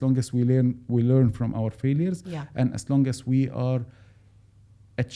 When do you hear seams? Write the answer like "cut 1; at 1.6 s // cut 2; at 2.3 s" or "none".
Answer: none